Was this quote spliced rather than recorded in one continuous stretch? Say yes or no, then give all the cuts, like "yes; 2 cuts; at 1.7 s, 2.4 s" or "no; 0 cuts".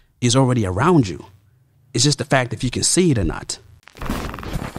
yes; 1 cut; at 3.8 s